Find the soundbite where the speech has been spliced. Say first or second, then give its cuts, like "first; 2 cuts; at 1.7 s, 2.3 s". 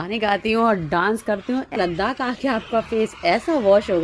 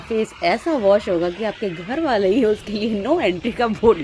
first; 1 cut; at 1.7 s